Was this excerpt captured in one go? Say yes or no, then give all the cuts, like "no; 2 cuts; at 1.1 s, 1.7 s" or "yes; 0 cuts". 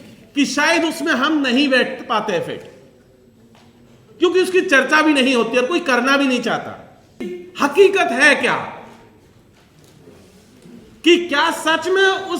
no; 1 cut; at 7.4 s